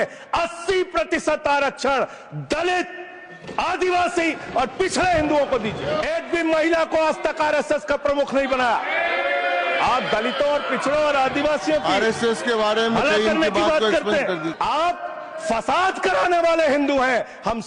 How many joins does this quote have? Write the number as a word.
two